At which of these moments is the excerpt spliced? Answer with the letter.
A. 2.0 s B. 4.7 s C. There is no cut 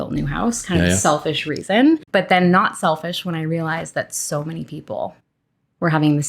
A